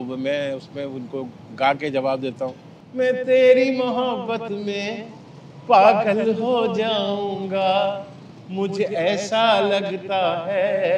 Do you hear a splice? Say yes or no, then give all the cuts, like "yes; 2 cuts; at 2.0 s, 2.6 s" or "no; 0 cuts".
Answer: no; 0 cuts